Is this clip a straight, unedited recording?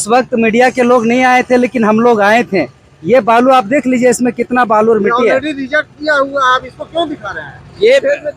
yes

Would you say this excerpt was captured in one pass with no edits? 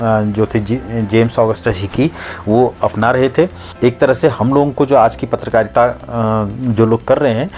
no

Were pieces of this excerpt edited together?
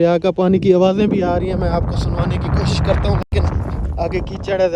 no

